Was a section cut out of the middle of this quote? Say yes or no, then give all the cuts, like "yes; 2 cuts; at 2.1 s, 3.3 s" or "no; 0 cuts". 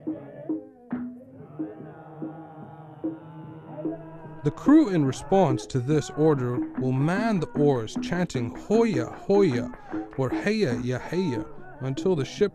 yes; 1 cut; at 8.5 s